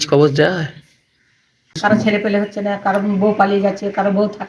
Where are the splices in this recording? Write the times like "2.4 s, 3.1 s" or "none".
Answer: 1.8 s